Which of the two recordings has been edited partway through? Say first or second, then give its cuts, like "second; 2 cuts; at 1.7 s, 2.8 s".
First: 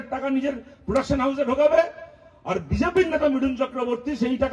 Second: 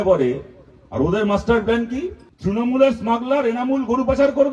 second; 1 cut; at 2.2 s